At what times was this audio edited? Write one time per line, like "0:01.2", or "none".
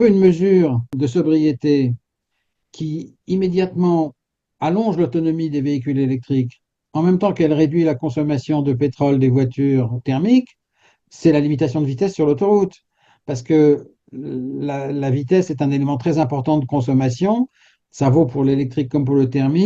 0:00.9